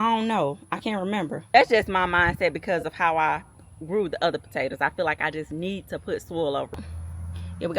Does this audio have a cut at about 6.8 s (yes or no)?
yes